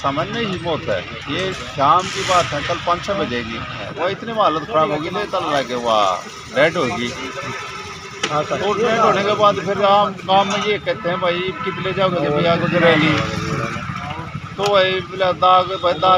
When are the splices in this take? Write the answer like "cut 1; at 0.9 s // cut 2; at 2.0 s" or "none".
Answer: cut 1; at 3.9 s